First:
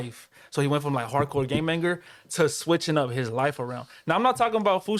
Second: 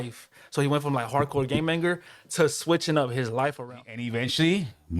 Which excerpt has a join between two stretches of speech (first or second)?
second